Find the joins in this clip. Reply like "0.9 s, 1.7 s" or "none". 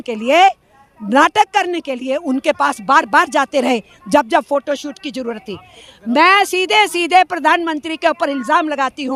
none